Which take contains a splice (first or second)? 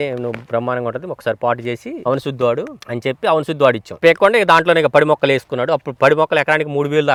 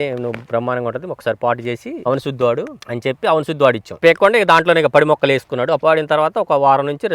second